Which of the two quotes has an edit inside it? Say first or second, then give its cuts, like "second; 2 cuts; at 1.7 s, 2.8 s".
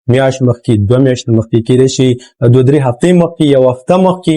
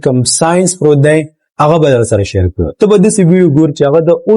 second; 1 cut; at 2.6 s